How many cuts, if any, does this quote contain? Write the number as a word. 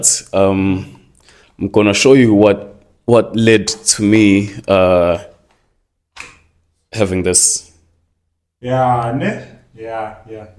zero